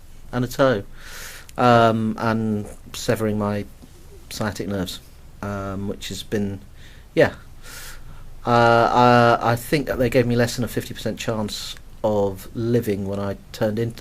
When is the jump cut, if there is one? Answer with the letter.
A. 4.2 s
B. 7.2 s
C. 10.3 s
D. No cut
B